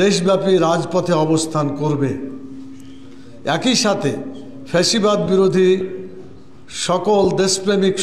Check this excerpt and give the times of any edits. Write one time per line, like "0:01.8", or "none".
none